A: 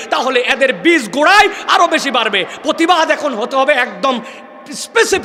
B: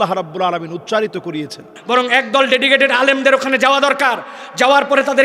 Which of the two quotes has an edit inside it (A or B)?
B